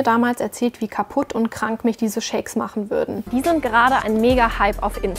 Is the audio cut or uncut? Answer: cut